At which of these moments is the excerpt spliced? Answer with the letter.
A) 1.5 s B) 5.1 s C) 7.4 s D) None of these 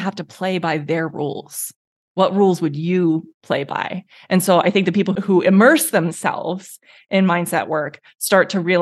B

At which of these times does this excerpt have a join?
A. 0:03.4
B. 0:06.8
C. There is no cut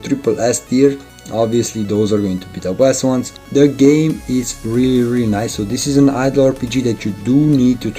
A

